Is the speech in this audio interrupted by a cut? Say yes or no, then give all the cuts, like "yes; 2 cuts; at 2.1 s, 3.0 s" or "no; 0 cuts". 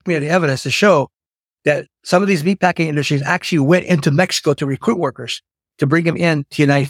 no; 0 cuts